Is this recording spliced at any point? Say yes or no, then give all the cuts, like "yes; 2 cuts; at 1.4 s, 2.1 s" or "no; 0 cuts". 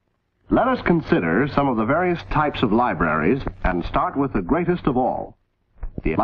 no; 0 cuts